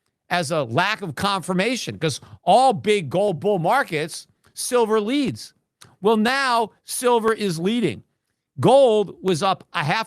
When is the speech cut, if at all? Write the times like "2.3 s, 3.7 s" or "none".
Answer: none